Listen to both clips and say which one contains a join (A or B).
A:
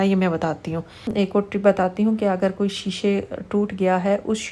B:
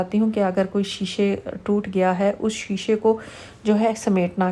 A